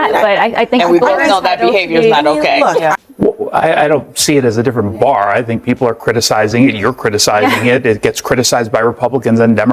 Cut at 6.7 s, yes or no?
no